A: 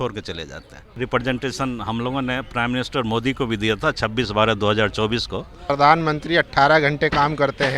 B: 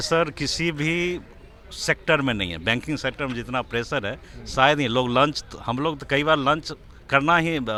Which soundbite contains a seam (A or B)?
A